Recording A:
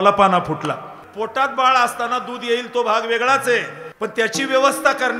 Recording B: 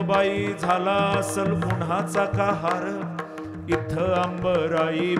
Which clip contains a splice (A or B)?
A